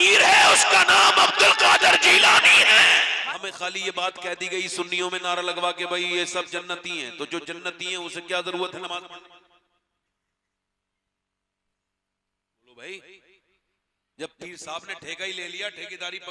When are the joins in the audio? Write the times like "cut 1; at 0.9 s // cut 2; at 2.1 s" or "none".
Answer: cut 1; at 3.2 s